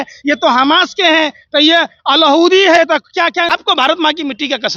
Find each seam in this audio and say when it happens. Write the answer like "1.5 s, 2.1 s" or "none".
3.5 s